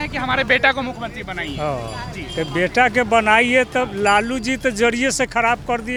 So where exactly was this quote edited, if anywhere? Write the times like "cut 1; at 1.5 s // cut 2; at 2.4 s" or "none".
none